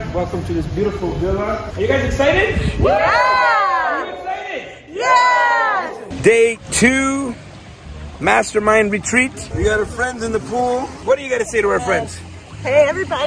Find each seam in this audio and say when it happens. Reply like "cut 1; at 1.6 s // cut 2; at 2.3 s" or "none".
cut 1; at 1.7 s // cut 2; at 6.0 s // cut 3; at 9.4 s // cut 4; at 11.0 s